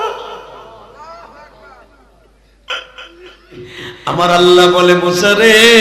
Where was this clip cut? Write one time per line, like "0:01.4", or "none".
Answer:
0:03.9